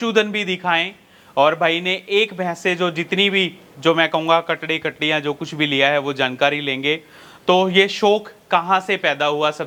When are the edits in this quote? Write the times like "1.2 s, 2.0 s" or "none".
none